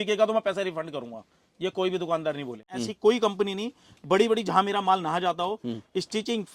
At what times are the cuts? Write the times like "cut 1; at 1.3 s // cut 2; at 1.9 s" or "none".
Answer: cut 1; at 2.8 s